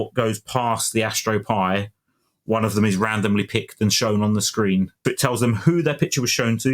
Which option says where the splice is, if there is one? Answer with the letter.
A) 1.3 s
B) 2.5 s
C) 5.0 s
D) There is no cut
C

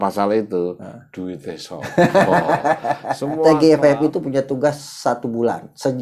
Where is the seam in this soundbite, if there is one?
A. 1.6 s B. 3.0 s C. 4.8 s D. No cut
B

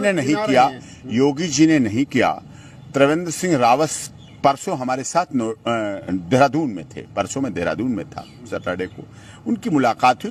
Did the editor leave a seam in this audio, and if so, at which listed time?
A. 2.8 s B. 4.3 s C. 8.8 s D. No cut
D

